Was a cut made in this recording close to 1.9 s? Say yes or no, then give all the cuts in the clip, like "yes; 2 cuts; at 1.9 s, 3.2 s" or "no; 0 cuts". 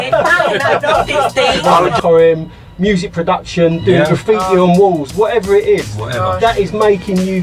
yes; 1 cut; at 1.9 s